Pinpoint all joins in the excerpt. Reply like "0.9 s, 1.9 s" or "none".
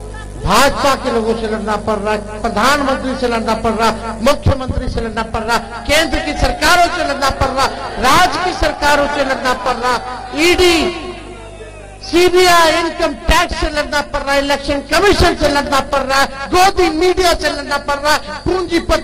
none